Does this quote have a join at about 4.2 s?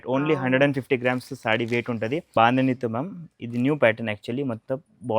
no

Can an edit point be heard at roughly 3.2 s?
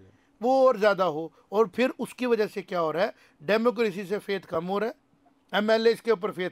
no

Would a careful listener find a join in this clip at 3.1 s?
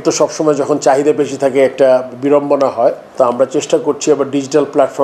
no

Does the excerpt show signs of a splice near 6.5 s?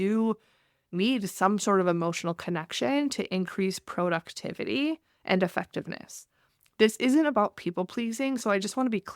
yes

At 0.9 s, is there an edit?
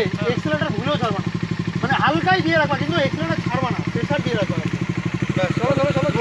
no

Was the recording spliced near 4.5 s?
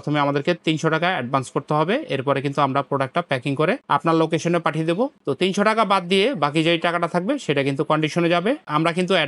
no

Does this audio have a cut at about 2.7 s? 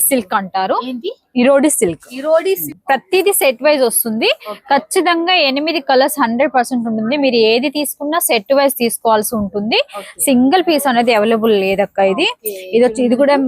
yes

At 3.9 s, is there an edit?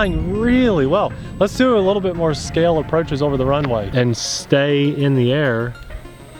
yes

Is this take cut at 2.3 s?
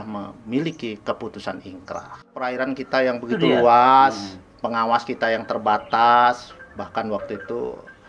yes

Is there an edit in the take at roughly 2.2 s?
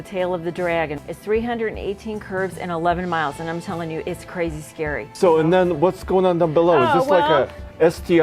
no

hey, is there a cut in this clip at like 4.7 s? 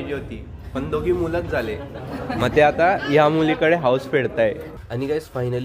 yes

